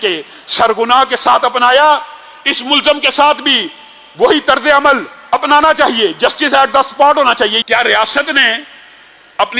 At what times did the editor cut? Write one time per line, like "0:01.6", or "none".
0:07.6